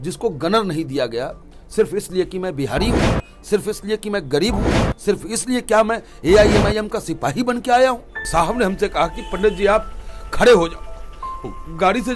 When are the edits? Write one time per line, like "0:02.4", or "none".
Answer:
0:08.1